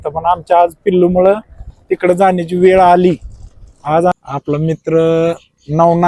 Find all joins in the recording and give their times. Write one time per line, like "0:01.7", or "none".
0:04.1

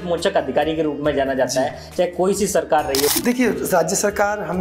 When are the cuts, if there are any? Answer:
0:03.1

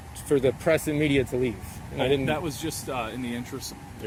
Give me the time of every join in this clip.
none

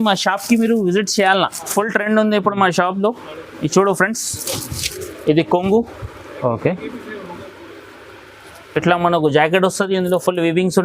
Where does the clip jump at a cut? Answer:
0:01.7

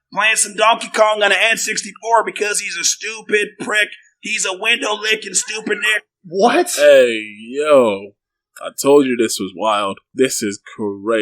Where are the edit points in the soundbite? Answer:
0:10.0

